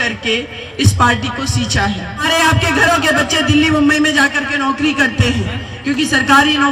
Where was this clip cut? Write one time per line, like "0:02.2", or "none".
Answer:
0:02.3

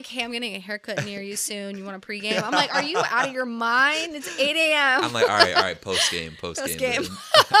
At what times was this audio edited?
none

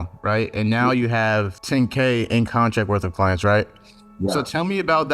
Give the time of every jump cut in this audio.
0:01.6

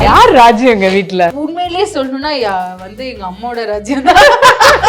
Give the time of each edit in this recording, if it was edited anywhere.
0:01.3

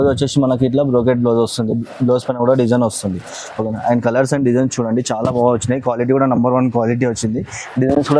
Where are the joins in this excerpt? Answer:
none

